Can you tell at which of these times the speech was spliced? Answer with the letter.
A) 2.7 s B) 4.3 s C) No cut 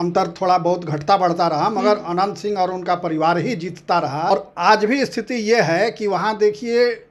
B